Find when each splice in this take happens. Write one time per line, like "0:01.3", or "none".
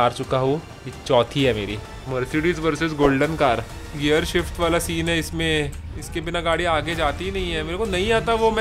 0:02.0